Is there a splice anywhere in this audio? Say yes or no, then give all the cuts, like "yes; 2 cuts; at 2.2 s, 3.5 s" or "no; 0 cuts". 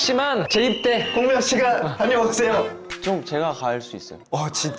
no; 0 cuts